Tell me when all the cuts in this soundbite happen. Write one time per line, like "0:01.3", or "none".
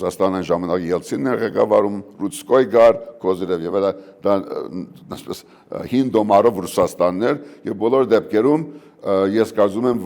none